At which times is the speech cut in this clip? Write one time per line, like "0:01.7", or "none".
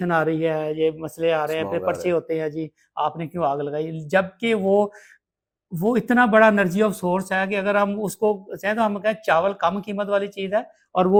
none